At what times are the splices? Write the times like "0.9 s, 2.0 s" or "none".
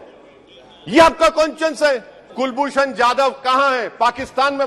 2.2 s

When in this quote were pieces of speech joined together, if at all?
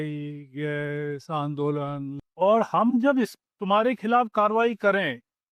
2.2 s

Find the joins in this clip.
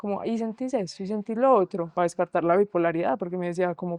none

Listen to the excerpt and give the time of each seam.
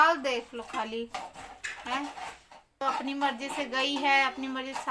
2.8 s

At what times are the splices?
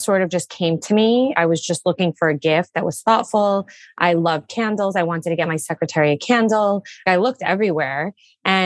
1.3 s, 7.0 s

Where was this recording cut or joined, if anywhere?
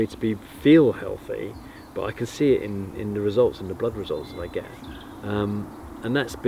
none

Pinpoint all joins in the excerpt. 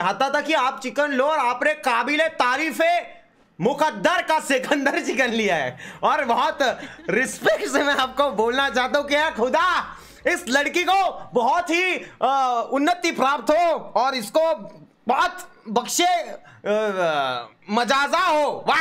none

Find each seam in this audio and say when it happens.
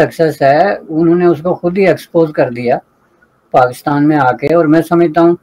none

